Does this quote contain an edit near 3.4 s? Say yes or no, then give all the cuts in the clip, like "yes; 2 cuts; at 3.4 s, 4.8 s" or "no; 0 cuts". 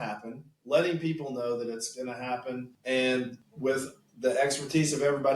yes; 2 cuts; at 2.7 s, 3.4 s